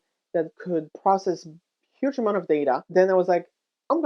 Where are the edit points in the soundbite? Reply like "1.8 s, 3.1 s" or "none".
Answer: 0.9 s, 2.8 s